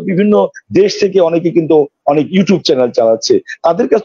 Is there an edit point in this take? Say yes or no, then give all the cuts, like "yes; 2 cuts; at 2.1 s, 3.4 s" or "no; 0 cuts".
no; 0 cuts